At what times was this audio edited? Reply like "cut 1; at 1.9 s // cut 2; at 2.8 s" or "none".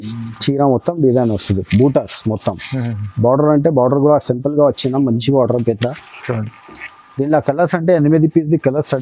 none